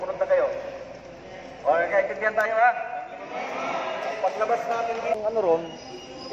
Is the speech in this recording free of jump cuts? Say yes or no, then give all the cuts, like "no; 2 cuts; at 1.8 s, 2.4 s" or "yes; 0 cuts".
no; 1 cut; at 5.1 s